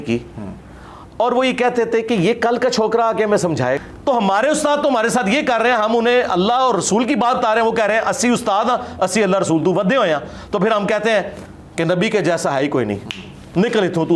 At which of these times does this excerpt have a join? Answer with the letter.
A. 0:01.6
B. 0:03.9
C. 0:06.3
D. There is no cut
B